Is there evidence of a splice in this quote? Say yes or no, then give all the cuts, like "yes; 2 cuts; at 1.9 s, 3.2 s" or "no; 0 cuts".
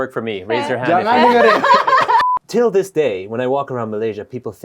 yes; 1 cut; at 2.2 s